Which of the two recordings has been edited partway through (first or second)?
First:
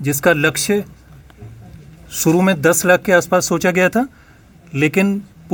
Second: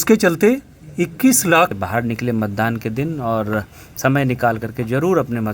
second